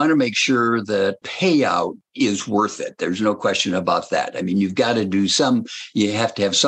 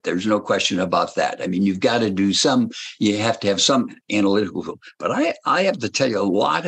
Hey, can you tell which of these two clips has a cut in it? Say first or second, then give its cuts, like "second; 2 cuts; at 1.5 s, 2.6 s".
first; 2 cuts; at 1.3 s, 2.0 s